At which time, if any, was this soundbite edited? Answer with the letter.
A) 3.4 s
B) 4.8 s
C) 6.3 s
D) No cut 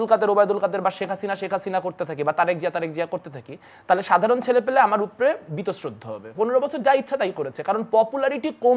C